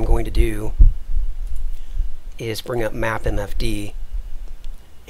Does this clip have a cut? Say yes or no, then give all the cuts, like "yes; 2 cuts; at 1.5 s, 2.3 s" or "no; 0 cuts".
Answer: yes; 1 cut; at 2.2 s